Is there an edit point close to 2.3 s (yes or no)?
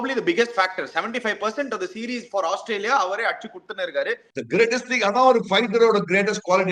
no